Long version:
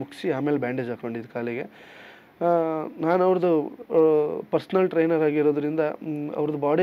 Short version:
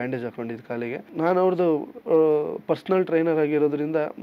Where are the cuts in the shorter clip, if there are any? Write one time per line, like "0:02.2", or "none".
0:01.1